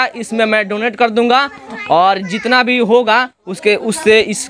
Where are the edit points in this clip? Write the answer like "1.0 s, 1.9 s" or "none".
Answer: none

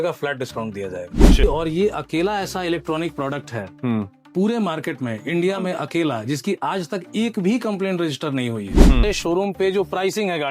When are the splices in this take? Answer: 1.4 s, 9.0 s

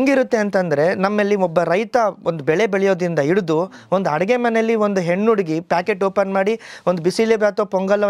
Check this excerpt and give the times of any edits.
none

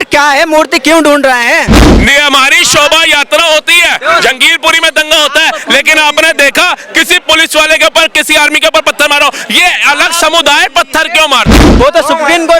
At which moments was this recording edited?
1.8 s, 11.7 s

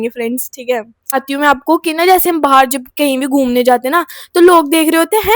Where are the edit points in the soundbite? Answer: 1.1 s

